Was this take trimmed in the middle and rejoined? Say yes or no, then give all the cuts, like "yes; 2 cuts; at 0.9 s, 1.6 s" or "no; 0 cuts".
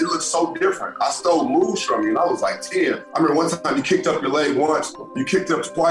yes; 1 cut; at 3.1 s